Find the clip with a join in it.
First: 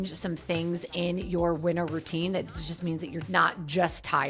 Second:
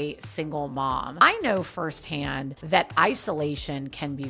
first; 1 cut; at 3.2 s

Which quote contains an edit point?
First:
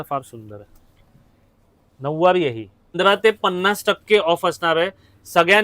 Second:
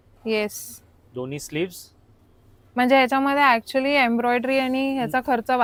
first; 1 cut; at 2.9 s

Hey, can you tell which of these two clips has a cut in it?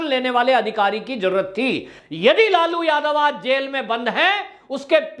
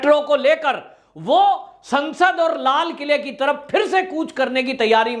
first; 1 cut; at 1.9 s

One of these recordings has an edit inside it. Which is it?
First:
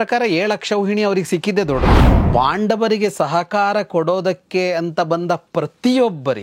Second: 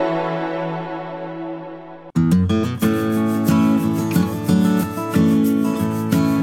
first; 1 cut; at 2.0 s

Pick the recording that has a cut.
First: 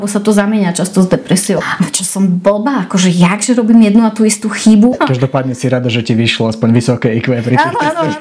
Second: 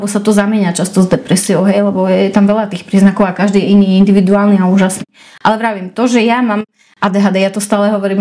first; 2 cuts; at 1.6 s, 4.9 s

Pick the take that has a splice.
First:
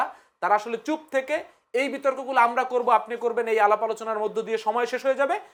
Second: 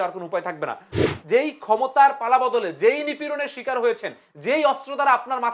second; 1 cut; at 0.9 s

